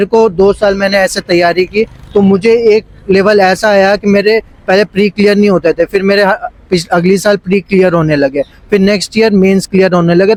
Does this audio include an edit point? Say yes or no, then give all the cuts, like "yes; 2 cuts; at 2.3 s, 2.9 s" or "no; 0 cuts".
no; 0 cuts